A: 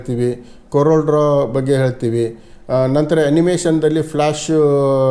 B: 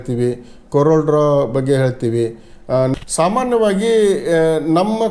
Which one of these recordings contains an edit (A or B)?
B